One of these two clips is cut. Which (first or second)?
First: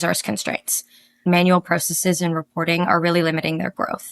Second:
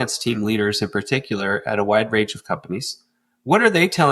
first